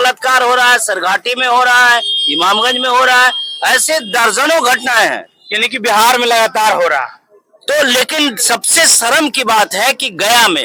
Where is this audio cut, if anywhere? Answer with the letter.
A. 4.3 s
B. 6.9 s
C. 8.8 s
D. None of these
D